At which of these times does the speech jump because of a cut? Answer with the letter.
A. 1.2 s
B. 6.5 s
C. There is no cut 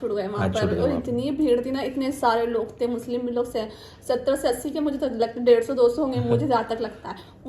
C